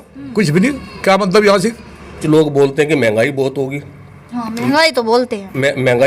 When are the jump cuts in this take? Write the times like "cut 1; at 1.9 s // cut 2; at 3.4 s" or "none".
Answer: cut 1; at 2.2 s